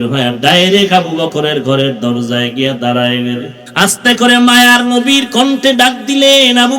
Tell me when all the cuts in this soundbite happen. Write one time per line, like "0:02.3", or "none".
0:03.6